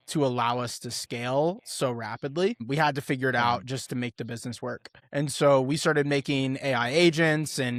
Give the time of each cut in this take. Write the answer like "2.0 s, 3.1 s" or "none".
none